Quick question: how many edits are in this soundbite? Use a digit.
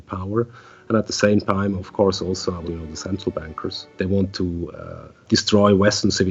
3